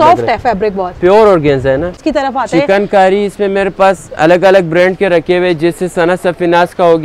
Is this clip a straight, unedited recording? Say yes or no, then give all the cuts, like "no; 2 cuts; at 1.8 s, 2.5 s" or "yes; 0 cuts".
no; 1 cut; at 2.0 s